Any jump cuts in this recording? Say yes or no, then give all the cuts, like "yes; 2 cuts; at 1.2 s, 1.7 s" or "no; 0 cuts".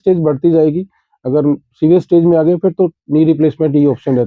no; 0 cuts